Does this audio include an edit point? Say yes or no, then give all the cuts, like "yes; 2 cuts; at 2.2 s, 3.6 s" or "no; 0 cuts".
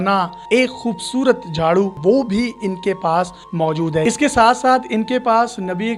yes; 2 cuts; at 2.0 s, 4.0 s